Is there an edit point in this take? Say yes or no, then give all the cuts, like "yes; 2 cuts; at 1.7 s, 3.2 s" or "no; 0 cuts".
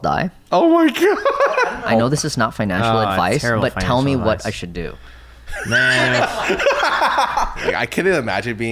yes; 2 cuts; at 1.6 s, 7.8 s